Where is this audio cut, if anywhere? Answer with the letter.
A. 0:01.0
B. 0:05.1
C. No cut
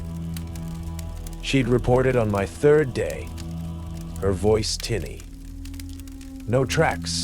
A